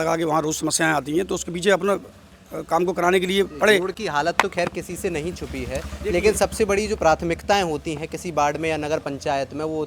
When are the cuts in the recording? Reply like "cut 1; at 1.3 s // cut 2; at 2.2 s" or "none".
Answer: none